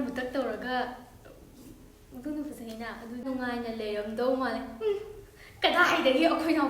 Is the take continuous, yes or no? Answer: no